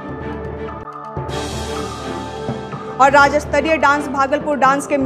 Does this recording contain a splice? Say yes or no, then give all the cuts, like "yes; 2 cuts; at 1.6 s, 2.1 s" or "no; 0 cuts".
no; 0 cuts